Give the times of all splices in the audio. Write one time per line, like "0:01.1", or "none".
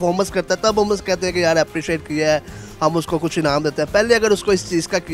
none